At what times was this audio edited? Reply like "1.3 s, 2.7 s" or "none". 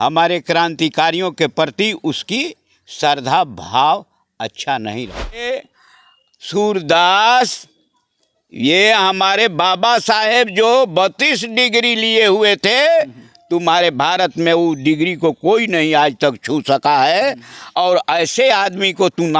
5.5 s